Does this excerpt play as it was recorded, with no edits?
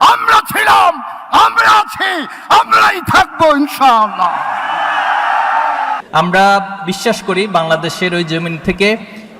no; 1 cut; at 6.0 s

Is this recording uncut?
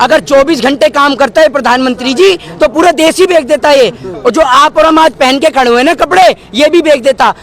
yes; 0 cuts

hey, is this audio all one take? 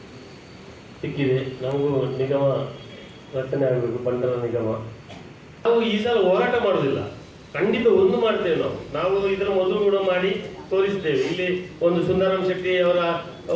no; 1 cut; at 5.6 s

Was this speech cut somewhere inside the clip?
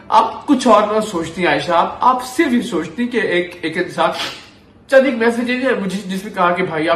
no; 0 cuts

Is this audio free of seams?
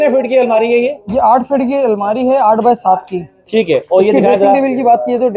yes; 0 cuts

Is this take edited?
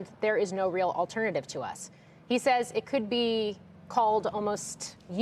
no; 0 cuts

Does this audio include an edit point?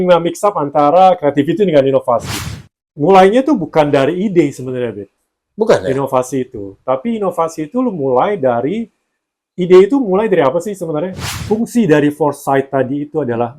yes; 2 cuts; at 2.4 s, 11.2 s

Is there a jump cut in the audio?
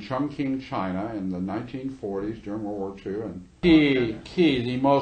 yes; 1 cut; at 3.4 s

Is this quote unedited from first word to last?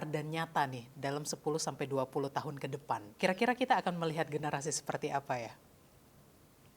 no; 1 cut; at 3.1 s

